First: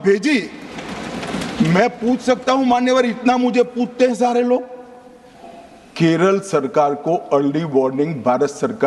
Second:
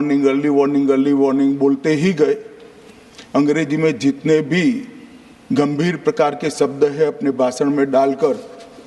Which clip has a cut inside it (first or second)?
first